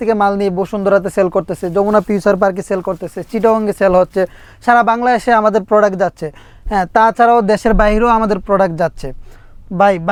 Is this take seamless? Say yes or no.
yes